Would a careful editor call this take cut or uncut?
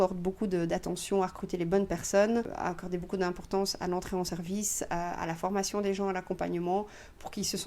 cut